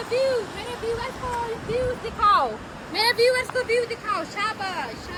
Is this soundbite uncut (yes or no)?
yes